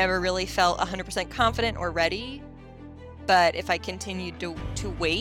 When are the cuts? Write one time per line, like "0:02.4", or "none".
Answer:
none

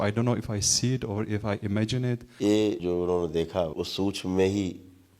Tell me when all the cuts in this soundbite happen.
0:02.3
0:02.8
0:03.7

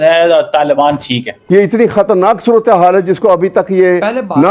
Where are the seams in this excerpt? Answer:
0:01.3

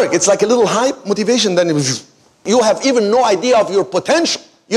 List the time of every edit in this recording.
0:02.4

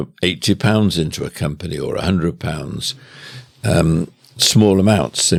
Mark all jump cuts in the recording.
none

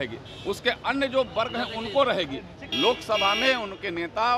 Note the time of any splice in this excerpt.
0:02.6

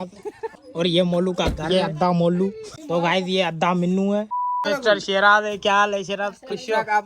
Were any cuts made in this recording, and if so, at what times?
0:04.7

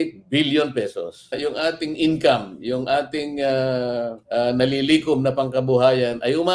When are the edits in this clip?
0:01.3

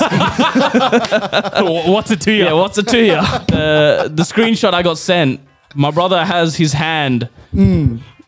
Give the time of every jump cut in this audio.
0:03.4

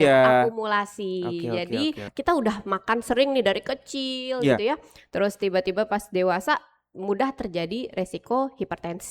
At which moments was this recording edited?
0:02.1

